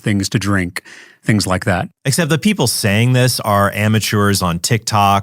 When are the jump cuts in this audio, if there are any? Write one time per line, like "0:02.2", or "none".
0:01.8